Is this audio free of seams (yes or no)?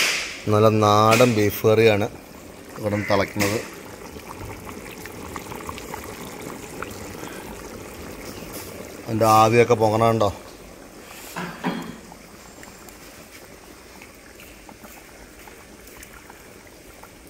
yes